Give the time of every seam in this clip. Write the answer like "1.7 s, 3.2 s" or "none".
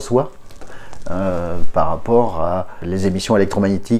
2.8 s